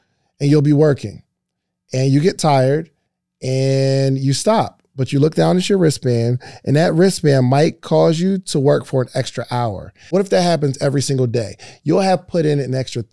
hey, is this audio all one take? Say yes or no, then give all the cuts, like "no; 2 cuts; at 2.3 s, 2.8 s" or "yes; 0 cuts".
no; 1 cut; at 10.1 s